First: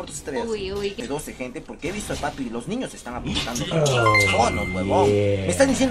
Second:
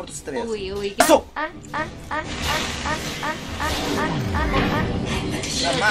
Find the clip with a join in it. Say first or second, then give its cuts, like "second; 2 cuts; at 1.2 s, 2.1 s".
first; 1 cut; at 0.9 s